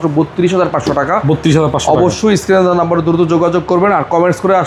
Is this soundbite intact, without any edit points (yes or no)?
yes